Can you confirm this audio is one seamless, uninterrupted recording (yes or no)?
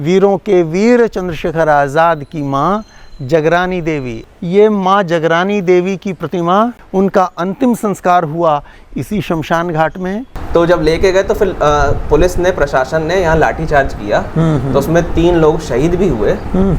no